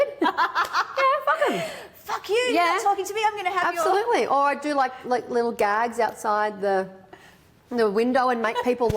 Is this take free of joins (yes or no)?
yes